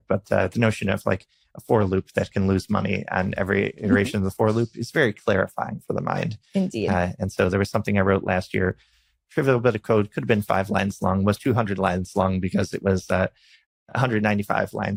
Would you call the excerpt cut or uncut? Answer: uncut